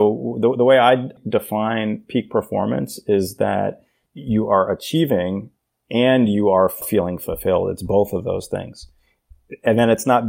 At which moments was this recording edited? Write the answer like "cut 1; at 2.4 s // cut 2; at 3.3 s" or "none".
none